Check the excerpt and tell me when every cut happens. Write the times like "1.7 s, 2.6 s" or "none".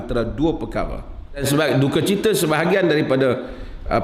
1.4 s